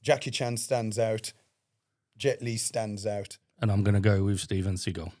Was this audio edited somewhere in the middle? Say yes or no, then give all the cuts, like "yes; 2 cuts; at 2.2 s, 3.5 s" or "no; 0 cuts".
no; 0 cuts